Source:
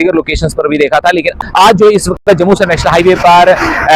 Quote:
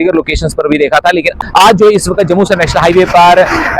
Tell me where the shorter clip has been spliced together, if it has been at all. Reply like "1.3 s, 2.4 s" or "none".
2.1 s